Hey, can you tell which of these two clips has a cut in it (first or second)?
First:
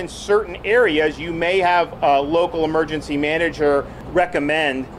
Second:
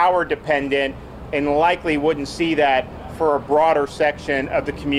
first